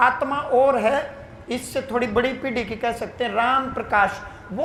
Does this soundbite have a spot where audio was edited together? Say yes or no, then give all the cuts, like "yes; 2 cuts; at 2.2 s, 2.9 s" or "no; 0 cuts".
no; 0 cuts